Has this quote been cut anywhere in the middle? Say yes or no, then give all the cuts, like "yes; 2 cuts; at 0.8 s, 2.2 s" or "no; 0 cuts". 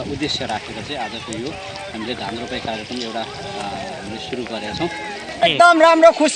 yes; 1 cut; at 5.4 s